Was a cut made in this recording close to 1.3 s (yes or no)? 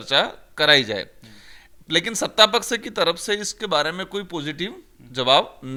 no